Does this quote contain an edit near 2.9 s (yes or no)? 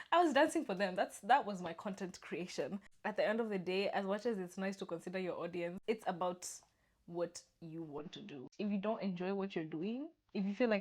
yes